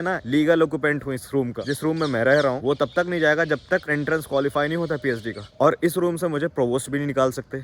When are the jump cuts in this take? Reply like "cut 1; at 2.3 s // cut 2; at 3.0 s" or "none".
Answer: none